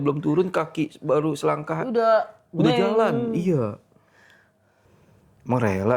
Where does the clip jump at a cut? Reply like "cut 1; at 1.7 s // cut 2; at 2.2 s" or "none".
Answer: cut 1; at 5.1 s